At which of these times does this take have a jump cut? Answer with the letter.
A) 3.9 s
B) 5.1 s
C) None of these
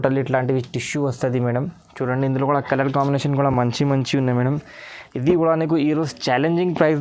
C